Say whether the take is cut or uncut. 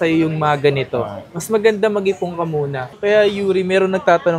cut